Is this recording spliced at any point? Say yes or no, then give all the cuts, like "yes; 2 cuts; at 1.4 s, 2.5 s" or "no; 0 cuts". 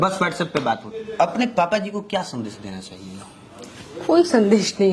yes; 1 cut; at 1.0 s